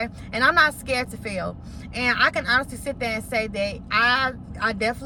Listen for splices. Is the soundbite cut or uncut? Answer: uncut